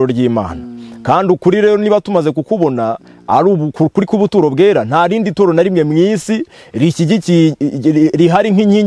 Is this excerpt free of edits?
yes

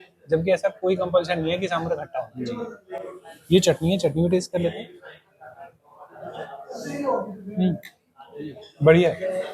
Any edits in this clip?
no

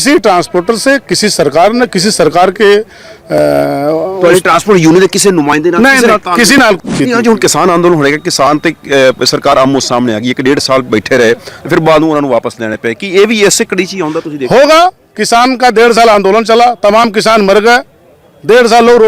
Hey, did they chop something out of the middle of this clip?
yes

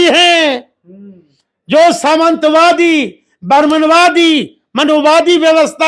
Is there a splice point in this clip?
no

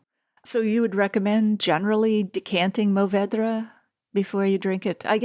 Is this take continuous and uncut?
yes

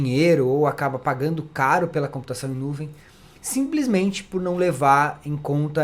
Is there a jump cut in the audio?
no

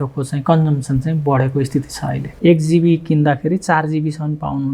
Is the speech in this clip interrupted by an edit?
yes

